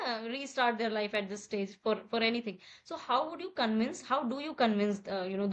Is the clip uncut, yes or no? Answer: yes